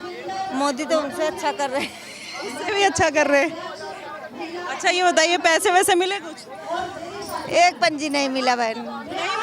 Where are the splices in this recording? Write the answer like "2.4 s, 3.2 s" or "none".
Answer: none